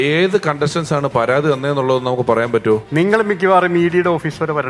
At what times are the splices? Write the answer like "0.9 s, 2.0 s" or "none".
2.9 s